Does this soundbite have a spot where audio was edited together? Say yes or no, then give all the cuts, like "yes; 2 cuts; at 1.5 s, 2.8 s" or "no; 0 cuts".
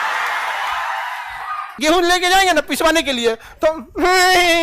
yes; 1 cut; at 1.7 s